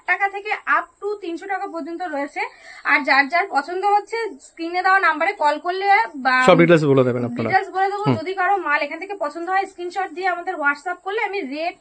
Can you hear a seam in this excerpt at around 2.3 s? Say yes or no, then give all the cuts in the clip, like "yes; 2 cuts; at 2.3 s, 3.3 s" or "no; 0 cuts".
no; 0 cuts